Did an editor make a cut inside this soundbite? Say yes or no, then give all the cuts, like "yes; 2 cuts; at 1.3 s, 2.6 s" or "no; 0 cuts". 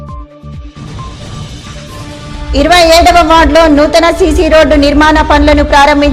no; 0 cuts